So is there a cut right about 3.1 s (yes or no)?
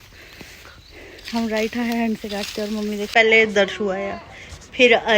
yes